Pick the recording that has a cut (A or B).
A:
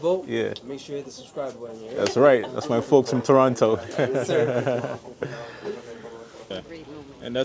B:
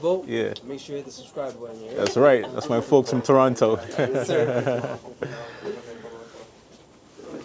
A